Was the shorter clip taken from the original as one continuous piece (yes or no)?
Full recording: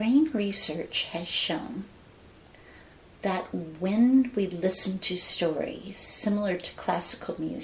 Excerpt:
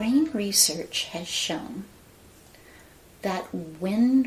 yes